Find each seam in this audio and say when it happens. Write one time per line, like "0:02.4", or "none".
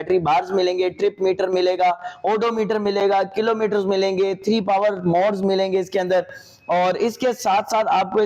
none

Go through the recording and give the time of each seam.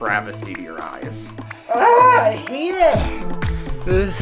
0:01.3

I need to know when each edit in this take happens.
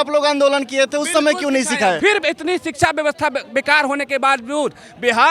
0:02.0

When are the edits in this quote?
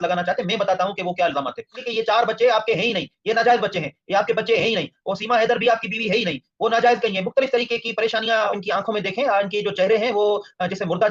0:01.8
0:08.5

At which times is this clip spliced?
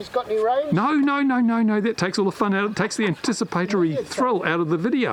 none

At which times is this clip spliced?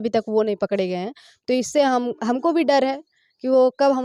none

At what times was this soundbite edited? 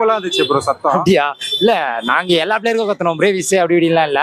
none

